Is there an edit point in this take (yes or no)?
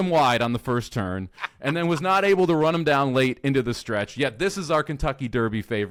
no